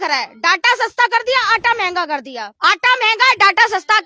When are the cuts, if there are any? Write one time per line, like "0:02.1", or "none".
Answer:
0:02.4